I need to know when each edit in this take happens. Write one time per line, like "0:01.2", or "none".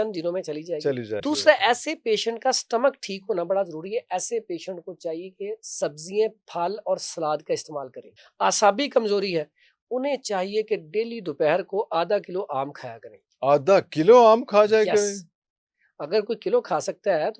0:01.2
0:08.2